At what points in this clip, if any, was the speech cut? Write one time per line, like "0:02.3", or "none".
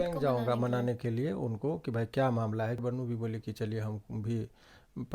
0:02.8